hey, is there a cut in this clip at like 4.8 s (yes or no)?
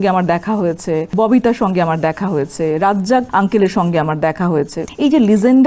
yes